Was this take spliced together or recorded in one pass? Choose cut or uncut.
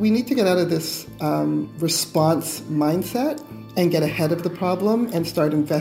uncut